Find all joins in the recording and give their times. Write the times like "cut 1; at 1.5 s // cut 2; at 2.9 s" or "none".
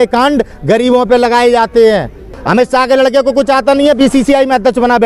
cut 1; at 2.4 s